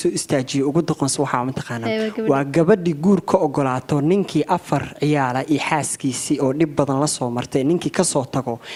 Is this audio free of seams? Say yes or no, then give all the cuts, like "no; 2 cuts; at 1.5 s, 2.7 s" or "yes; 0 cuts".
yes; 0 cuts